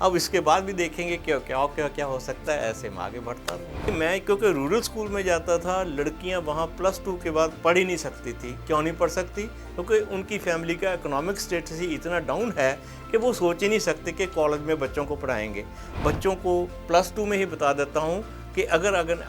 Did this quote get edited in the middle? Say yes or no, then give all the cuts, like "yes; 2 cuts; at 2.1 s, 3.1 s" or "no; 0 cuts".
yes; 2 cuts; at 3.9 s, 15.8 s